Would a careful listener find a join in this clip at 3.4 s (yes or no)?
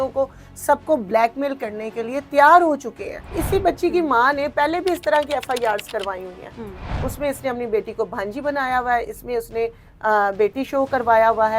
yes